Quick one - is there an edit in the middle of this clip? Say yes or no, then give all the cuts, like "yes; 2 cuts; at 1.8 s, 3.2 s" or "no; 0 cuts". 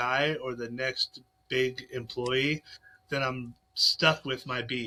no; 0 cuts